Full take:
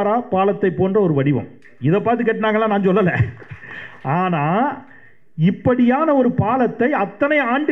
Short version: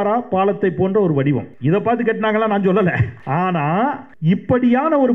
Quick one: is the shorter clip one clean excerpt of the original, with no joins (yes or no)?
no